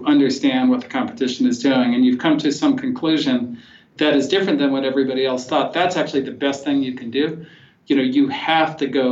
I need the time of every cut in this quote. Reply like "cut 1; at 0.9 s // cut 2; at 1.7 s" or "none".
cut 1; at 7.7 s